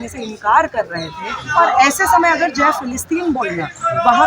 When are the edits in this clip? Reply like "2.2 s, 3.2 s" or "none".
1.4 s

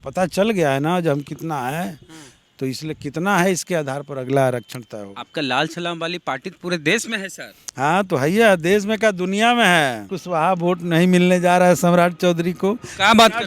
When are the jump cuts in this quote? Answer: 10.1 s

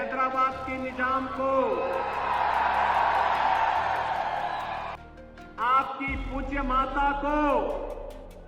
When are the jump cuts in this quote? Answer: 5.0 s

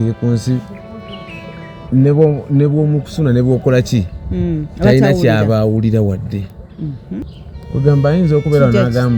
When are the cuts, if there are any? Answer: 7.3 s

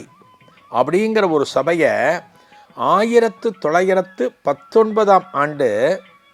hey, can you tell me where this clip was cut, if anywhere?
none

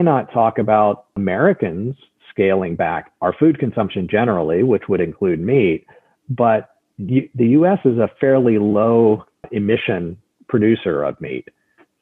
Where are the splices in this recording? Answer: 1.1 s, 9.5 s

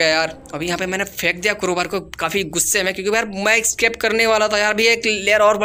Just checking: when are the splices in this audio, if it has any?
none

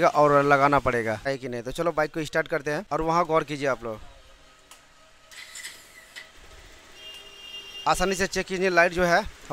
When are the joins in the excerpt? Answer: 1.3 s, 2.8 s

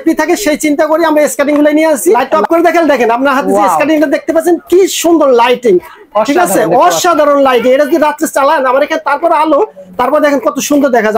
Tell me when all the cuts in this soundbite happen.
2.2 s

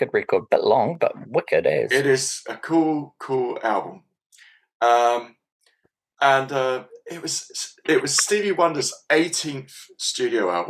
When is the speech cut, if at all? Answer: none

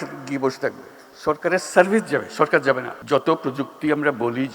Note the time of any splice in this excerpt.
2.9 s

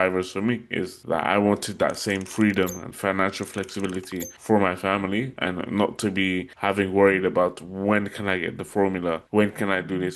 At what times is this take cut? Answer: 1.0 s, 4.3 s, 6.5 s, 9.2 s

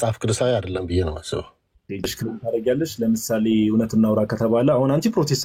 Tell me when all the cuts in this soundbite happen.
2.2 s

